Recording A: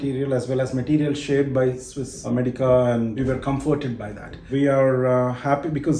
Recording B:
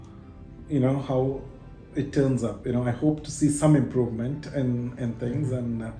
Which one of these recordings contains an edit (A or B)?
A